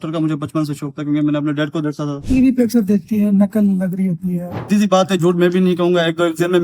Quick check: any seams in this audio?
yes; 2 cuts; at 2.2 s, 4.6 s

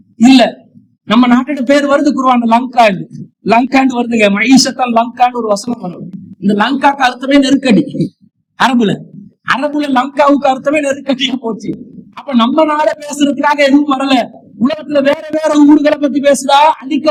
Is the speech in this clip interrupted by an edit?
no; 0 cuts

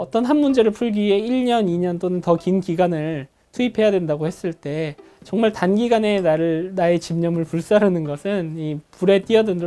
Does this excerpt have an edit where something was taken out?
no; 0 cuts

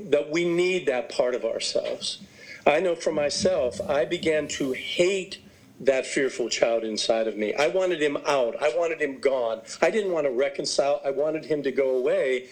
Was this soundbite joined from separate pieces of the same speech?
no; 0 cuts

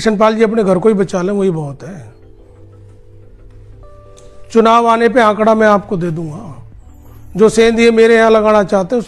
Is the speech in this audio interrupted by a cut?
no; 0 cuts

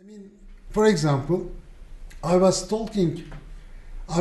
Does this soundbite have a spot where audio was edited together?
no; 0 cuts

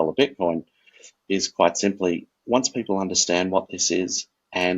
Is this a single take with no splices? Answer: no; 1 cut; at 2.3 s

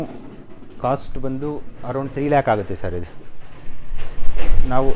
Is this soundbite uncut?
yes; 0 cuts

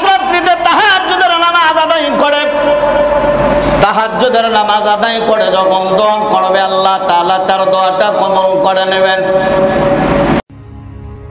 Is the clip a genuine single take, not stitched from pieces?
no; 1 cut; at 10.4 s

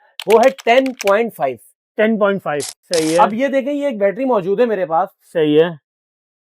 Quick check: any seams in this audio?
yes; 1 cut; at 2.7 s

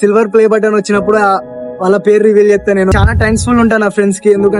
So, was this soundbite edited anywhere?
yes; 1 cut; at 2.9 s

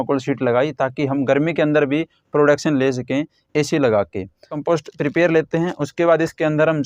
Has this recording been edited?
yes; 1 cut; at 4.6 s

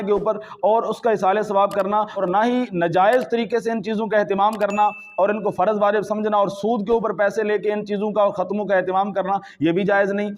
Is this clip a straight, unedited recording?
no; 1 cut; at 2.2 s

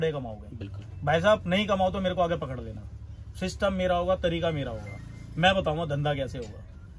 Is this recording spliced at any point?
no; 0 cuts

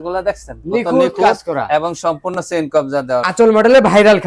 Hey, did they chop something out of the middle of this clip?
yes; 1 cut; at 3.3 s

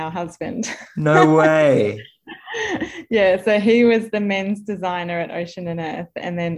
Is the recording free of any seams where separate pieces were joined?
yes; 0 cuts

